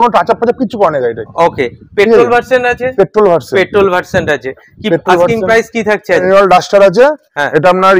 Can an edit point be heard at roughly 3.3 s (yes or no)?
no